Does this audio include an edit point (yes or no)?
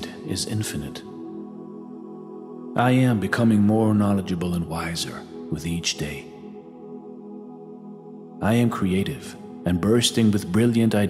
no